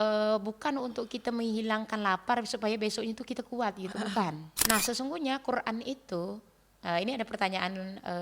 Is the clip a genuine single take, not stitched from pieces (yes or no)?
no